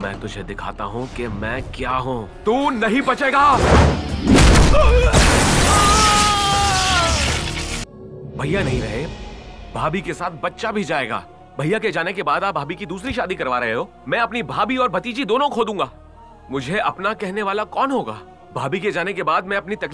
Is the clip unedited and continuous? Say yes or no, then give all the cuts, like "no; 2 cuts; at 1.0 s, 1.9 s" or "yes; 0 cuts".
no; 1 cut; at 7.7 s